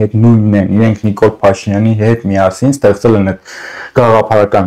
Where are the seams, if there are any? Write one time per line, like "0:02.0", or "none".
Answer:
none